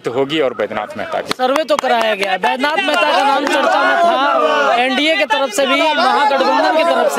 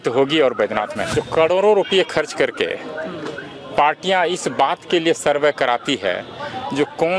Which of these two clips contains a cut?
second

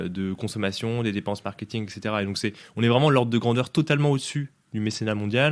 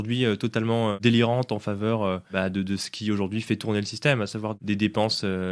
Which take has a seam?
second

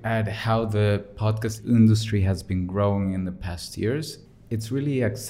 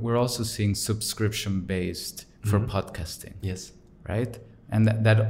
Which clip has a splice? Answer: first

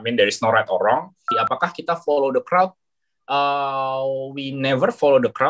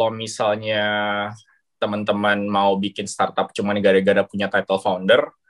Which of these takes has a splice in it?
first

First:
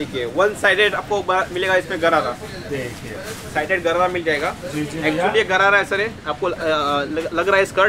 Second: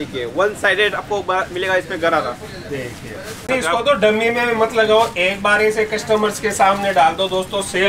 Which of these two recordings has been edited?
second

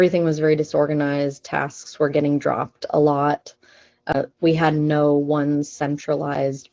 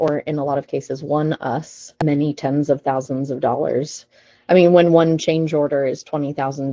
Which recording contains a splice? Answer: second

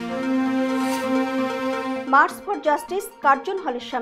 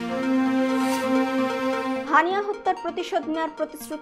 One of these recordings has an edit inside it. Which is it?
second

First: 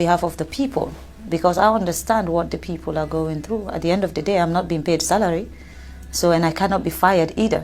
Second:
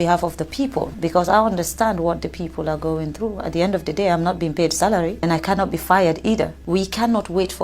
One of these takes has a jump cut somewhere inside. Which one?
second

